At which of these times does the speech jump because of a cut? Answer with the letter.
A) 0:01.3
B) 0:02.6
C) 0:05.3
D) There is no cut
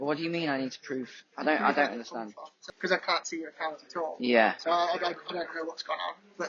B